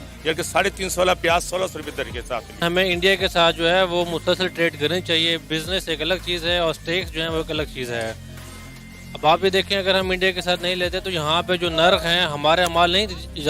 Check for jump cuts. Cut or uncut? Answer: cut